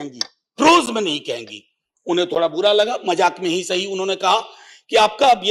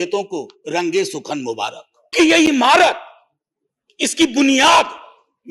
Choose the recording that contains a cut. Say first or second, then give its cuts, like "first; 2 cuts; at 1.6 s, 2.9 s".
second; 1 cut; at 2.1 s